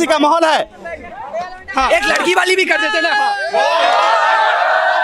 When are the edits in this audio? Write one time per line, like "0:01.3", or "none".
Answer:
none